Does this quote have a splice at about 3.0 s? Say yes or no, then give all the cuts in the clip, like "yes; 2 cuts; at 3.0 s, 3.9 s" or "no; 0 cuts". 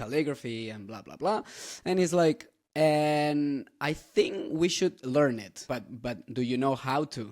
no; 1 cut; at 5.6 s